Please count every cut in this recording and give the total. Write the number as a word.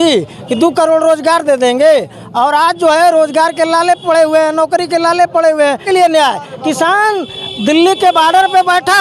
one